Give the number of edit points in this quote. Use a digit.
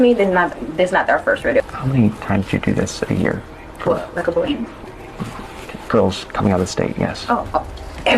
1